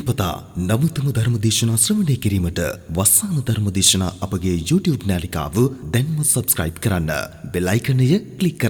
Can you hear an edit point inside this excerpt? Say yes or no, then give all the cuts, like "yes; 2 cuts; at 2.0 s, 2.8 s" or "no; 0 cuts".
no; 0 cuts